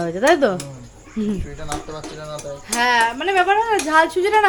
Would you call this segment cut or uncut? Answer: uncut